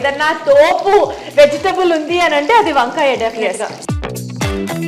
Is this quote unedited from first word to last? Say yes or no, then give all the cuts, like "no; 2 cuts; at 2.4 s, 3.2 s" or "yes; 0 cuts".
no; 1 cut; at 3.8 s